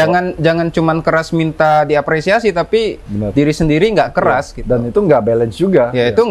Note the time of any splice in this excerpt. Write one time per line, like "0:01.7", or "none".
none